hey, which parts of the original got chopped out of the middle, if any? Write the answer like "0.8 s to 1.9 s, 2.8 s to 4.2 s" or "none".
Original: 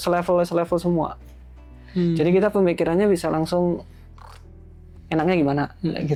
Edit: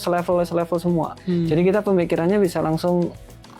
1.2 s to 1.8 s